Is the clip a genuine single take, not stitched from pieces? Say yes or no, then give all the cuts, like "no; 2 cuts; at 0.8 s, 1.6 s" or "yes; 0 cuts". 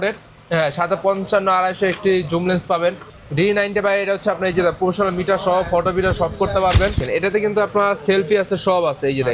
no; 2 cuts; at 3.1 s, 7.0 s